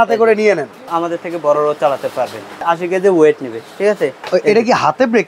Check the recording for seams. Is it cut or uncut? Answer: cut